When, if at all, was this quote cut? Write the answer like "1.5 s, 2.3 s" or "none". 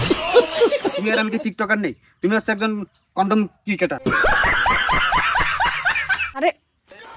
1.0 s